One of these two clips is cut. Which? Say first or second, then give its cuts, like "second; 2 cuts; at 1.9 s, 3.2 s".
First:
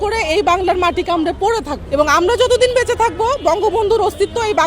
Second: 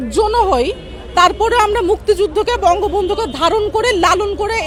first; 1 cut; at 1.8 s